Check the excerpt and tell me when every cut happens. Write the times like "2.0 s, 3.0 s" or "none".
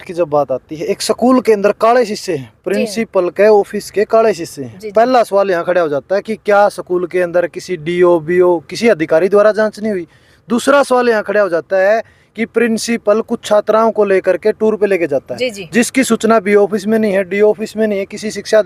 none